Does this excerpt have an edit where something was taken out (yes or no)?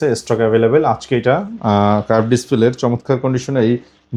no